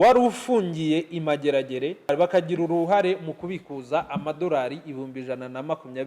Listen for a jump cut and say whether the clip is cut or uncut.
cut